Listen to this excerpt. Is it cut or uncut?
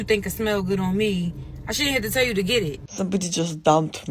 cut